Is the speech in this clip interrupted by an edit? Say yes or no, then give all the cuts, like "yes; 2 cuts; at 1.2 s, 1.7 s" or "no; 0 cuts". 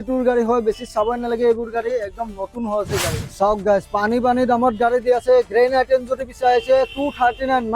yes; 1 cut; at 3.2 s